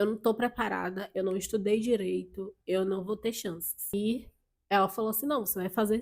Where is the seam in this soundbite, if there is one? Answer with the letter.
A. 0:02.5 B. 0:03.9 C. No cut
B